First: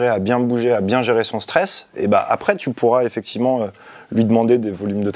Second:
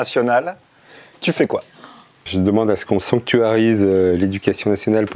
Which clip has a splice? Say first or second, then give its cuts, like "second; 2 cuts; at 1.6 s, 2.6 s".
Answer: second; 1 cut; at 2.1 s